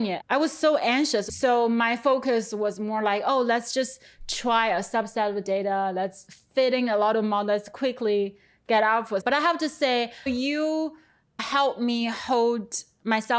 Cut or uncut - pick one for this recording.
cut